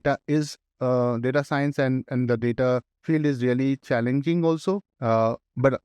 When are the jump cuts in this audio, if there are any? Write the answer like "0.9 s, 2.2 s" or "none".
2.9 s, 4.9 s

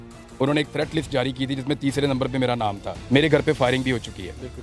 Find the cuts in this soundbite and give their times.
2.9 s

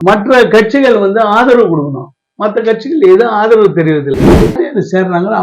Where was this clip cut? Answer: 4.2 s

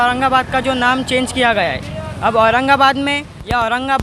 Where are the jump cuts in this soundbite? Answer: none

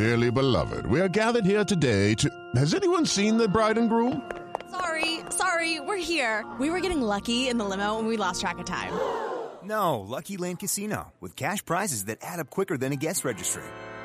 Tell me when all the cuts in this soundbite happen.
none

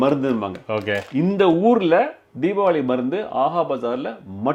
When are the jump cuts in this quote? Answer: none

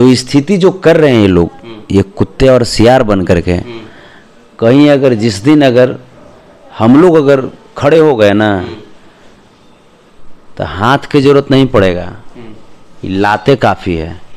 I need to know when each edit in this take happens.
none

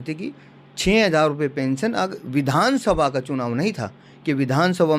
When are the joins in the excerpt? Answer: none

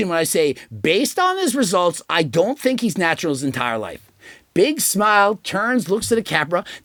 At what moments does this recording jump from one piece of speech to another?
none

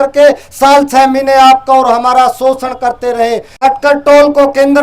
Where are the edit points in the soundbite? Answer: 3.5 s

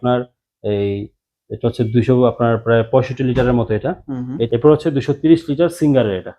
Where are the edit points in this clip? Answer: 4.5 s

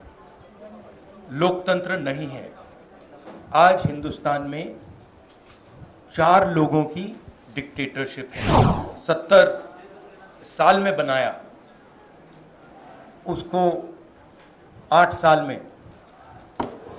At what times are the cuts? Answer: 8.6 s

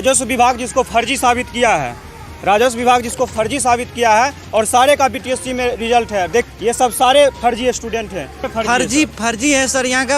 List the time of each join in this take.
6.5 s, 8.5 s

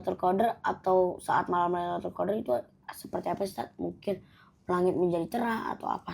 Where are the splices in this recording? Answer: none

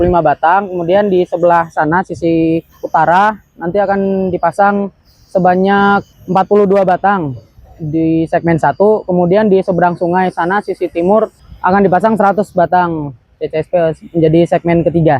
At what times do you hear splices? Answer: 2.7 s, 6.2 s, 11.4 s

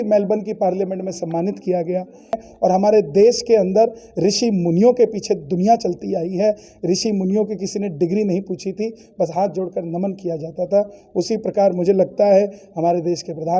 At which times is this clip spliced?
2.4 s

